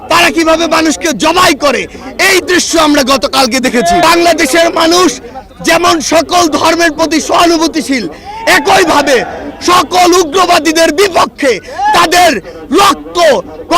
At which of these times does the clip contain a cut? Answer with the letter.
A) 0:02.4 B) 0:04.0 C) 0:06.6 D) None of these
B